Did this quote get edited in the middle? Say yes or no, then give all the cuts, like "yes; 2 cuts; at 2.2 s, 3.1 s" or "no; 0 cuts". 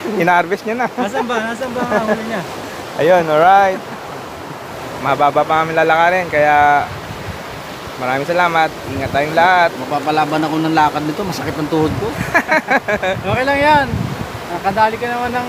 no; 0 cuts